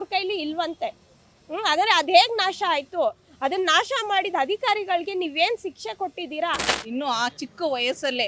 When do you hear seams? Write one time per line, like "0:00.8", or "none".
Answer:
0:06.7